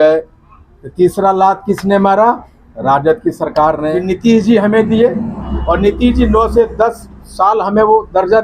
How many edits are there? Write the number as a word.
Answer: one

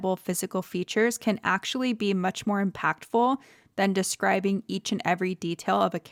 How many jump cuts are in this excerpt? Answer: zero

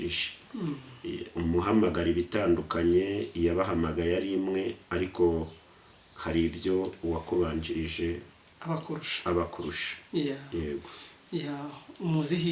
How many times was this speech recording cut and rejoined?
zero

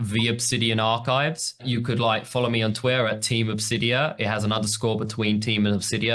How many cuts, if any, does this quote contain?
one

